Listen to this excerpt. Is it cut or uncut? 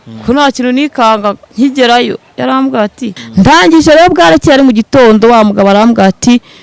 cut